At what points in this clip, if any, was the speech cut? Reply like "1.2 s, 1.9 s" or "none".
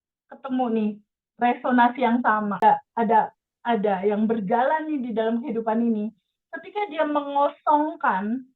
2.6 s